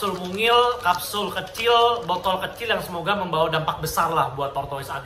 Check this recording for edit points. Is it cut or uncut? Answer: uncut